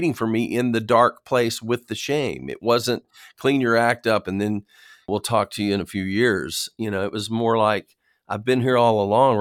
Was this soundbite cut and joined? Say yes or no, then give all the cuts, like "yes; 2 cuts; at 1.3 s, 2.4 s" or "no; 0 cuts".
yes; 1 cut; at 5.1 s